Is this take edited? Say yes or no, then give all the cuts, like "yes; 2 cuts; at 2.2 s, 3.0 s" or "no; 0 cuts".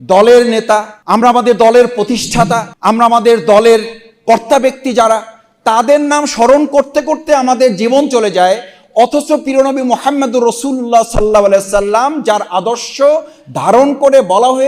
yes; 2 cuts; at 0.9 s, 2.7 s